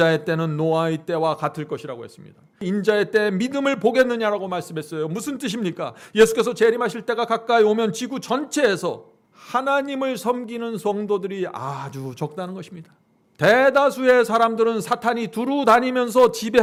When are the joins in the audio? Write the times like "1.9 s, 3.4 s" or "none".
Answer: none